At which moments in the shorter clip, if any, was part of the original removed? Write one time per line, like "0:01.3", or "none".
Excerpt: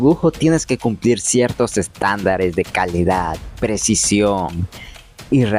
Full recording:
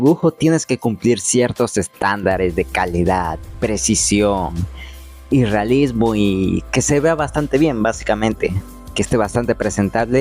none